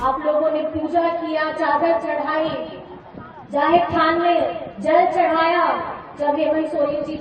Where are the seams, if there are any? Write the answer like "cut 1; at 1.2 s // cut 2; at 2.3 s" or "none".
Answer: none